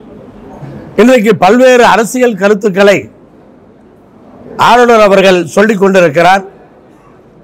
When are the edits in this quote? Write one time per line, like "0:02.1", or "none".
none